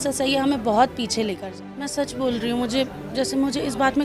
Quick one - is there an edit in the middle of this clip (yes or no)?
yes